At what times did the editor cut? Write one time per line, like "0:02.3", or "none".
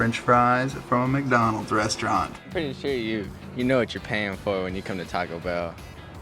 0:02.4